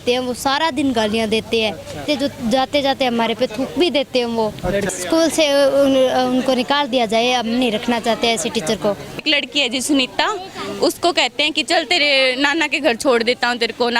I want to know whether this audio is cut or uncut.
cut